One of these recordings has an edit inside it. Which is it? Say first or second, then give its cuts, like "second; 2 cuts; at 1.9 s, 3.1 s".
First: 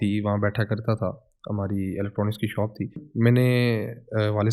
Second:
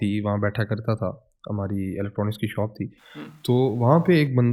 first; 1 cut; at 3.0 s